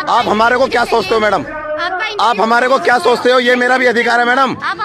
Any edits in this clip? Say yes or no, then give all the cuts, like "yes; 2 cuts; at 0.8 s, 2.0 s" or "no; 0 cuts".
no; 0 cuts